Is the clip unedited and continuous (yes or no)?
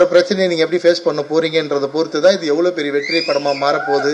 yes